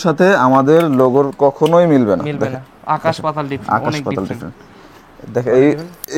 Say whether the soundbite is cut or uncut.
uncut